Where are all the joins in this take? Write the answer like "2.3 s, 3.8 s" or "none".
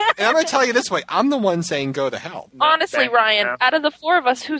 2.5 s